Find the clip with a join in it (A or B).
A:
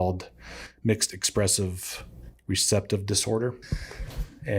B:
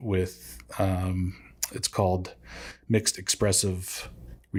A